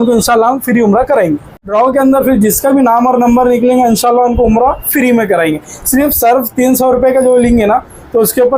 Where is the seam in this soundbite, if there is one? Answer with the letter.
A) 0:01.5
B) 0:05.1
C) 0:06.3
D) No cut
A